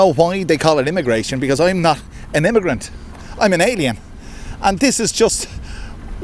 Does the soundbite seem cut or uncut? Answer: uncut